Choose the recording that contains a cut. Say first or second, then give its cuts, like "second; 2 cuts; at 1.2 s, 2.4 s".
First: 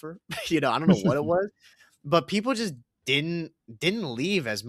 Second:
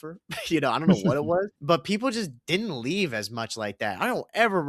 second; 2 cuts; at 1.6 s, 2.4 s